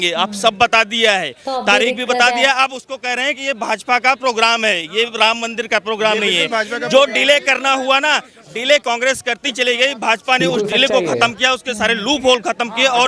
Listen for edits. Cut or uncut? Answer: uncut